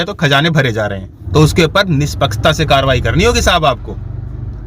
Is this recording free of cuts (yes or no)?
no